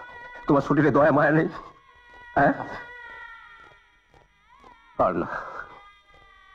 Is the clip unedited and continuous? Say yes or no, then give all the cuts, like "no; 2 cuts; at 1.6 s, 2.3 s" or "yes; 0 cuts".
yes; 0 cuts